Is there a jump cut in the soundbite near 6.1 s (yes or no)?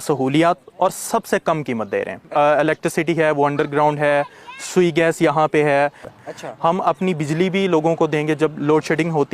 yes